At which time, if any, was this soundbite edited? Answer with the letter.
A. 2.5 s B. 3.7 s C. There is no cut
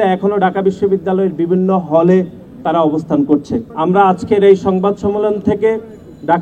B